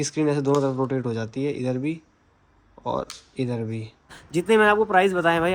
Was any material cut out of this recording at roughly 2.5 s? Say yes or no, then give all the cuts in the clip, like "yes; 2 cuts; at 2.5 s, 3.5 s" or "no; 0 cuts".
no; 1 cut; at 4.2 s